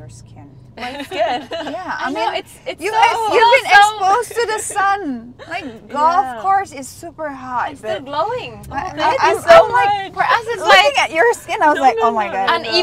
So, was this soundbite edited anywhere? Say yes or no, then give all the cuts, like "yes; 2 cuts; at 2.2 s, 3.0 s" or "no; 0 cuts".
no; 0 cuts